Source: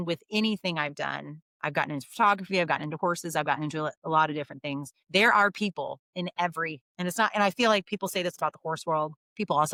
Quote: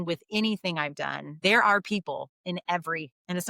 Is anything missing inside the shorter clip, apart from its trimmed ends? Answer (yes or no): yes